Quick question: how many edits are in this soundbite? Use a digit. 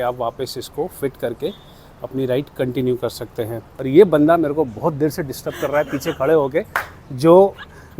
1